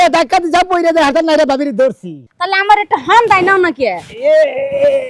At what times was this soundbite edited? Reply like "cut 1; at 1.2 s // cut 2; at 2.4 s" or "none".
cut 1; at 2.3 s